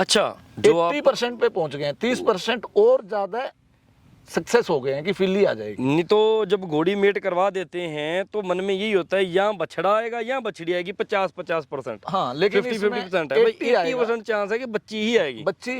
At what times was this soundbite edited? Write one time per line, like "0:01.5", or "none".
none